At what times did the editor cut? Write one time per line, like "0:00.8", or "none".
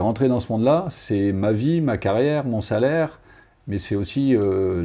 none